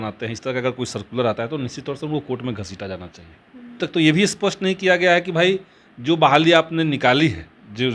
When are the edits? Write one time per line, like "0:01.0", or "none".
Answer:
0:03.8